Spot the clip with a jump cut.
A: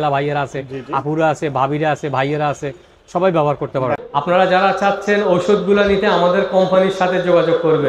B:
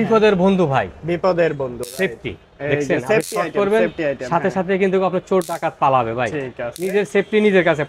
A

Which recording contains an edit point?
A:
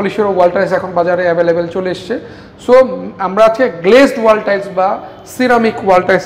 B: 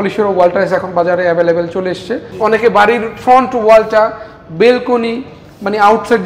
B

